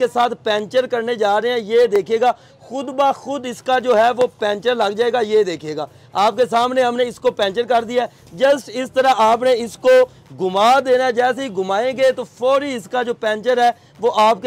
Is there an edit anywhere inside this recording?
no; 0 cuts

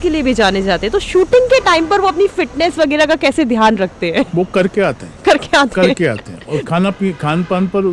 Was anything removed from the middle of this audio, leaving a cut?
no; 0 cuts

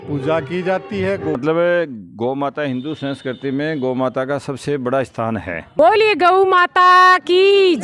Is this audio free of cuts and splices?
no; 2 cuts; at 1.4 s, 5.7 s

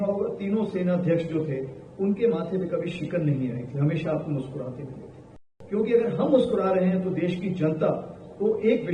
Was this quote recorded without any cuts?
no; 1 cut; at 5.5 s

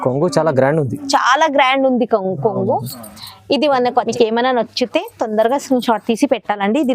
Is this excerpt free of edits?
no; 1 cut; at 4.1 s

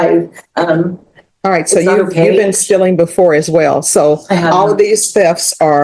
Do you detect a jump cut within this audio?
no; 0 cuts

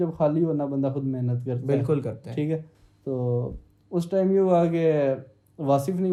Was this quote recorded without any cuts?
yes; 0 cuts

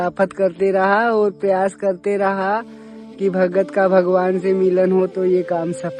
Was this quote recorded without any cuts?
yes; 0 cuts

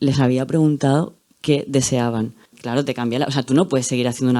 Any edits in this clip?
yes; 1 cut; at 2.6 s

